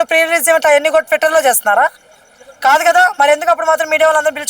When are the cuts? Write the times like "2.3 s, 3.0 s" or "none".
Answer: none

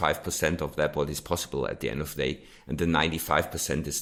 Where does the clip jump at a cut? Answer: none

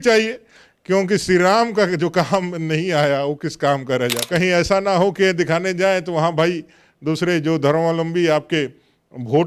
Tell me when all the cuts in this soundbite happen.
4.2 s

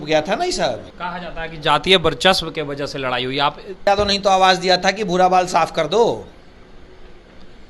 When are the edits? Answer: 1.0 s, 3.8 s

